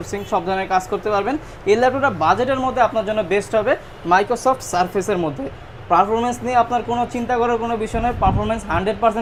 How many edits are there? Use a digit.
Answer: 0